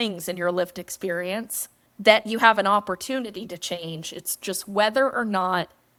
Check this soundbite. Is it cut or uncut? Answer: uncut